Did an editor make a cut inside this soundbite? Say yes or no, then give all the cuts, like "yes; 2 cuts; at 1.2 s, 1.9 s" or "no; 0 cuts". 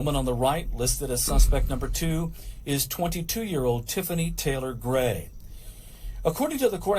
no; 0 cuts